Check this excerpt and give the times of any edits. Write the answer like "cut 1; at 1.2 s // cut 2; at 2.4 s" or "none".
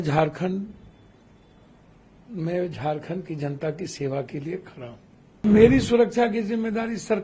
cut 1; at 5.4 s